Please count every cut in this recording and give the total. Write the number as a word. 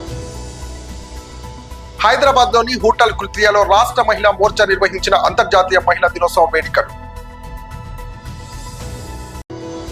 two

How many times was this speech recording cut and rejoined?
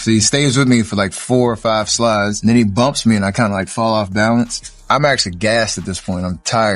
two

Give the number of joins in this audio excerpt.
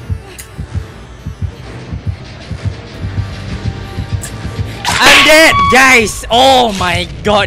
zero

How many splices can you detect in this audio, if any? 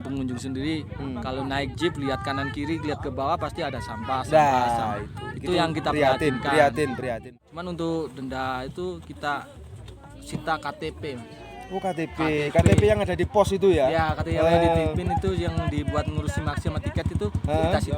one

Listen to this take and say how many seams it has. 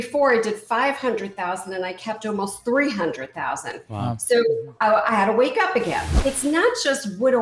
one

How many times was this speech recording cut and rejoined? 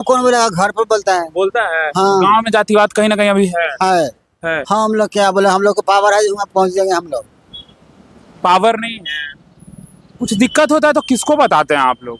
one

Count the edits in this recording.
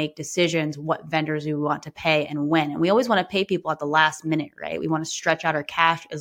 zero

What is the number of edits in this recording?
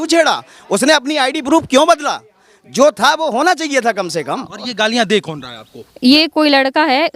one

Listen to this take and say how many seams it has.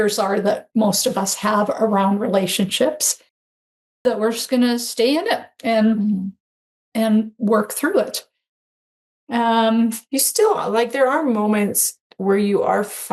zero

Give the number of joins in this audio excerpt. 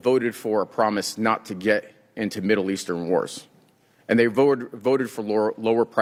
zero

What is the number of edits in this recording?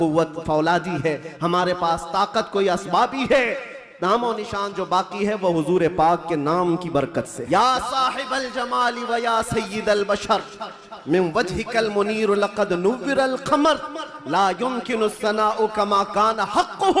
one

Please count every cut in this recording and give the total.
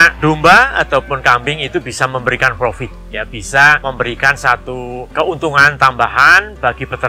two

